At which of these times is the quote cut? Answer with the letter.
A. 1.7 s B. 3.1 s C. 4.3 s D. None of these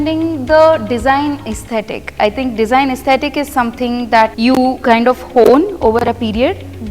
C